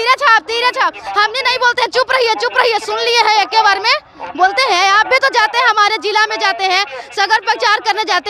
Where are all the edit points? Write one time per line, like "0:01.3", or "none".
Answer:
none